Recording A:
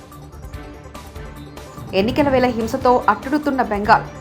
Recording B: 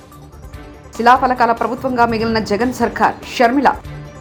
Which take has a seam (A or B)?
A